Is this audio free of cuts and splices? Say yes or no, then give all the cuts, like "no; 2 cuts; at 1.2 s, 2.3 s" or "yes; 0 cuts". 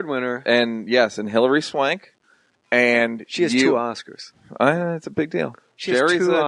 no; 1 cut; at 5.5 s